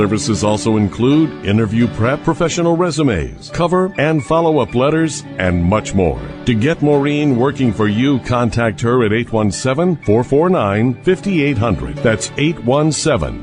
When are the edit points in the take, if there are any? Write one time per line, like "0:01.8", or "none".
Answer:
none